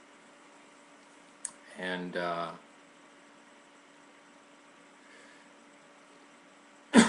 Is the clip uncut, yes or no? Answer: no